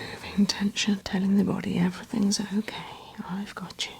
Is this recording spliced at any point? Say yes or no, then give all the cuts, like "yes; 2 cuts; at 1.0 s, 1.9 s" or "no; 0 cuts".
yes; 1 cut; at 1.0 s